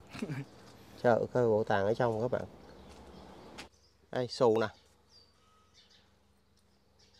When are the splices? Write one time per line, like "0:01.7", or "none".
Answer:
0:03.7